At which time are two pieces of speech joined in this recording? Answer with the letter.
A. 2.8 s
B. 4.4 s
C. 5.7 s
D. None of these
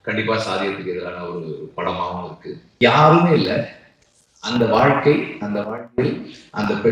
A